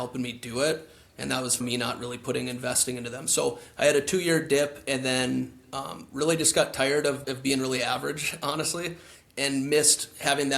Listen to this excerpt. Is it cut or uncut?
cut